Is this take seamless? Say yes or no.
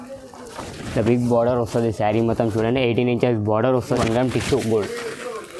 no